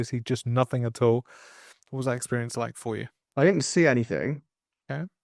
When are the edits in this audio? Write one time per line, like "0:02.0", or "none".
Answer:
0:03.2